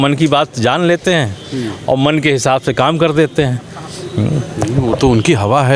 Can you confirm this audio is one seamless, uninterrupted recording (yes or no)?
yes